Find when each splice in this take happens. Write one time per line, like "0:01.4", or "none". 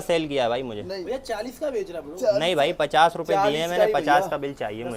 none